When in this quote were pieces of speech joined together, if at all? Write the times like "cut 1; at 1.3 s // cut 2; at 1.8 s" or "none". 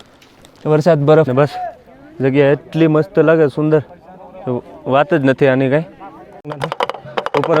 cut 1; at 1.3 s // cut 2; at 6.4 s

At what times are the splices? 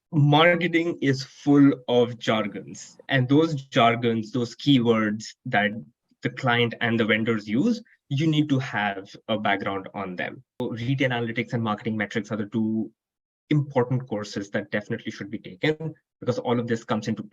cut 1; at 10.6 s

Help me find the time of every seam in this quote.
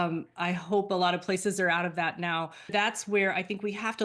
cut 1; at 2.7 s

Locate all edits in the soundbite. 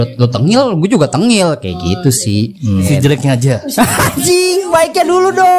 cut 1; at 2.9 s

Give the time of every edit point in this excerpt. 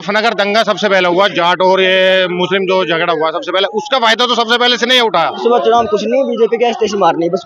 cut 1; at 5.4 s

